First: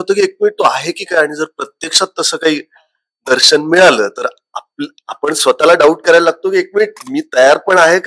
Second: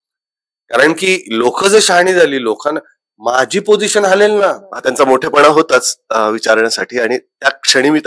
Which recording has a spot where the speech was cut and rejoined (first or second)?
second